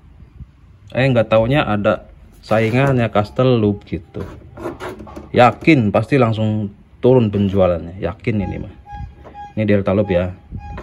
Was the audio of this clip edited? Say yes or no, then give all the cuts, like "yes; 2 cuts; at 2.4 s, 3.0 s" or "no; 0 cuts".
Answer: no; 0 cuts